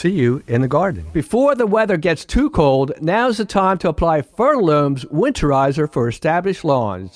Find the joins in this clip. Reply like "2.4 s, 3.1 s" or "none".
1.0 s

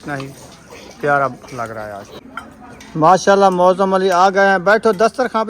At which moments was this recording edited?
2.2 s

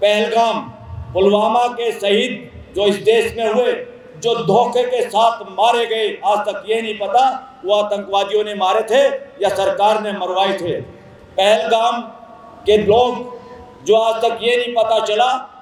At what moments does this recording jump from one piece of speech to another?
none

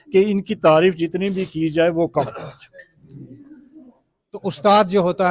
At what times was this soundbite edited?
none

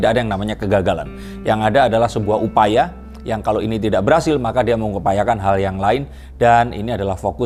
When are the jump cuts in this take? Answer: none

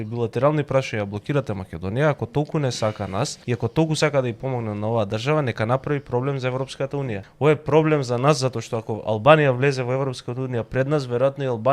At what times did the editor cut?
3.4 s, 7.2 s

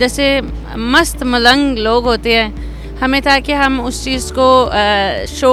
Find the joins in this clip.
none

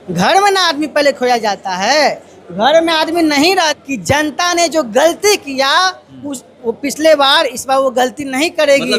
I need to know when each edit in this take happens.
3.8 s

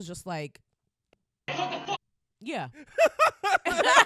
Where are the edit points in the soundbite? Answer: 1.1 s

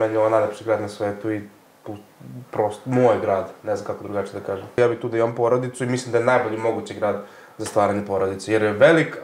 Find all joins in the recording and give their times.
4.8 s

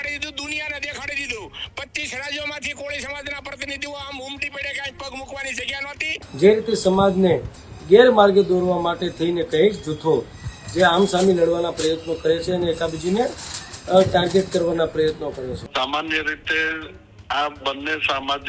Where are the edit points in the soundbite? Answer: 6.2 s, 15.6 s

